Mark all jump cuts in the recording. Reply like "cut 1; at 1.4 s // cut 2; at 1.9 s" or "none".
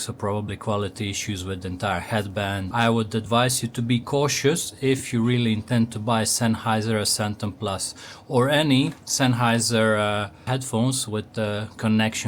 cut 1; at 2.7 s // cut 2; at 10.4 s